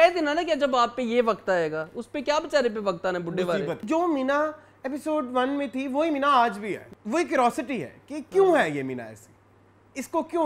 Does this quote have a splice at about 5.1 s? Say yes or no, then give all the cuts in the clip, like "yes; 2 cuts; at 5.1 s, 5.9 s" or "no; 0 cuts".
no; 2 cuts; at 3.8 s, 6.9 s